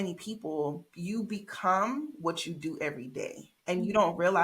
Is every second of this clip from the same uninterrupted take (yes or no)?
no